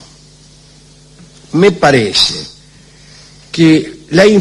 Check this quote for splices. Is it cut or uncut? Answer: cut